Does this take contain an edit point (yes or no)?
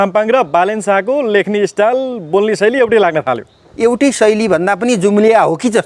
yes